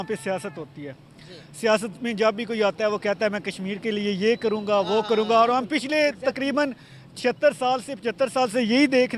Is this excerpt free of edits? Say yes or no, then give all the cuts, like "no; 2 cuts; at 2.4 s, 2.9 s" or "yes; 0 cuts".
yes; 0 cuts